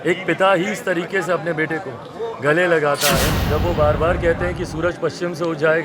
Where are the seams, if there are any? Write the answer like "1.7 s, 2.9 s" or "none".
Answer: 3.4 s